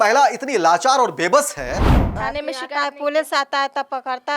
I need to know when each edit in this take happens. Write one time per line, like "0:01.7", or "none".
0:02.0